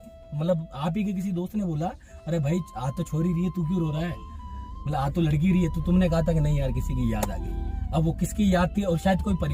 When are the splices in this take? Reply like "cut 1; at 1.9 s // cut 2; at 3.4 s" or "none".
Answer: none